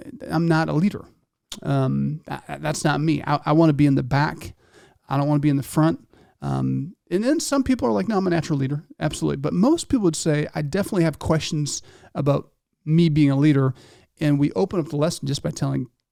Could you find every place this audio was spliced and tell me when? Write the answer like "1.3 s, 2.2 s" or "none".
none